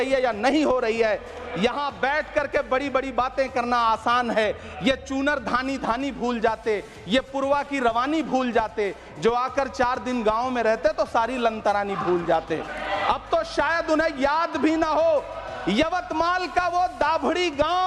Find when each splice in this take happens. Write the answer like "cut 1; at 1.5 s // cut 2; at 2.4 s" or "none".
cut 1; at 12.7 s